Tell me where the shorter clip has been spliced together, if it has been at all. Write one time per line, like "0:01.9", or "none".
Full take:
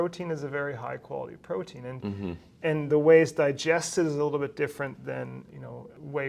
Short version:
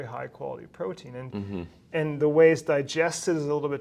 none

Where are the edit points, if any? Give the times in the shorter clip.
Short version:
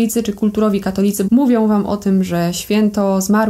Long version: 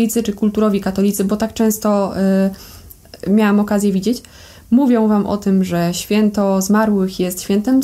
0:01.2

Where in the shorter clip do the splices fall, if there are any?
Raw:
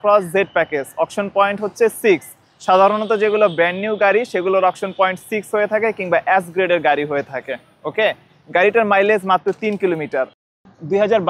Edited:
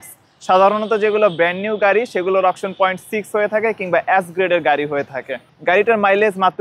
0:05.4

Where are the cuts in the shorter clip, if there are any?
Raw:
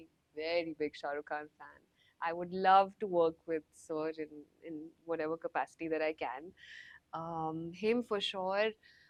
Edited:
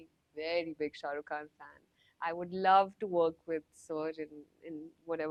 none

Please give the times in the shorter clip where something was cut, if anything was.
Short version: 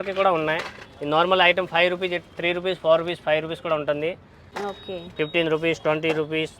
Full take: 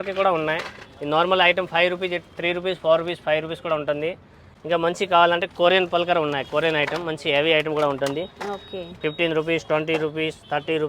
0:04.5

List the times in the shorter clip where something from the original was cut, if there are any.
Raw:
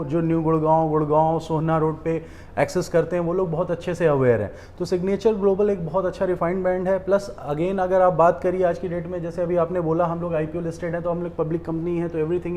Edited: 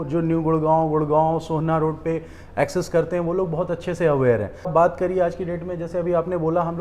0:04.7

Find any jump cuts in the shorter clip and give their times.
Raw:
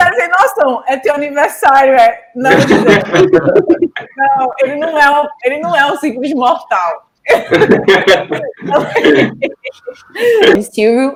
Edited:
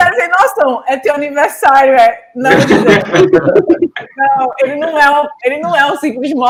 none

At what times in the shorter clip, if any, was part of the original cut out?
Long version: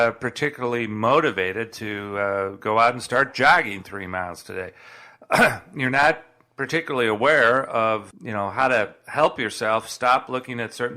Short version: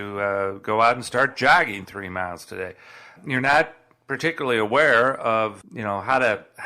0:03.2

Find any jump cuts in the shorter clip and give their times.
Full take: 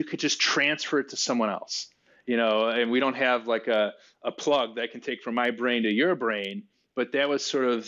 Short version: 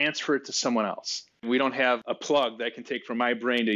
0:01.7

